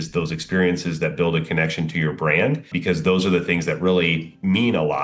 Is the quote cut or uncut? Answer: cut